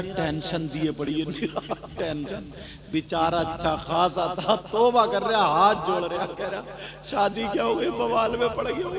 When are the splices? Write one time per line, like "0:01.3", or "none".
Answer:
none